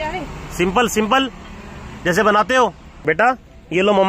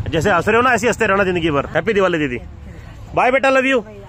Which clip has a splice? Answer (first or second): second